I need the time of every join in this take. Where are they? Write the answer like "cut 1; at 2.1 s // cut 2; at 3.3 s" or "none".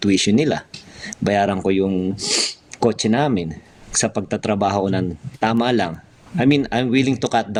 none